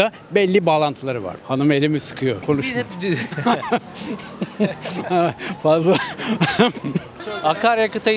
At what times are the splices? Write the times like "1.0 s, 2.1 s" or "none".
7.2 s